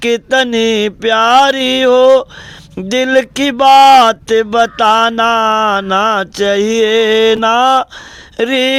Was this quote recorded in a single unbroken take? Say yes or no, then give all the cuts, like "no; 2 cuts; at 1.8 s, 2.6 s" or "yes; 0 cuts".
yes; 0 cuts